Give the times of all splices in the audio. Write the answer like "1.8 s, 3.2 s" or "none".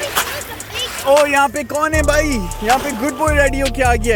none